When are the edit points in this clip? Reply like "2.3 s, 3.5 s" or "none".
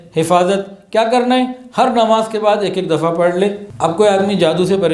3.7 s